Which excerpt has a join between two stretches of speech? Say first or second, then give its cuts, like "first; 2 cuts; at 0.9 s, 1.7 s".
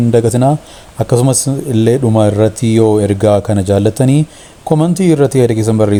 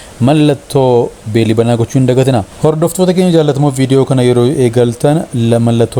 second; 1 cut; at 2.5 s